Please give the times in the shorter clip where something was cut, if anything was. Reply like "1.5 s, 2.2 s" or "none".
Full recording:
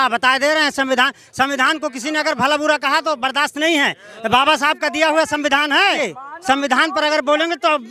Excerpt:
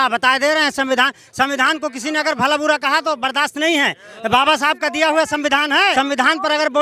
5.9 s